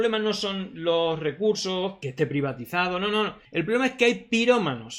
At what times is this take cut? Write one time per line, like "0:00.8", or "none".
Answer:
0:02.0
0:03.4